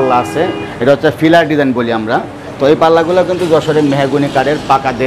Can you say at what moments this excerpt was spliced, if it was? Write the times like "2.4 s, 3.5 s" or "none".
none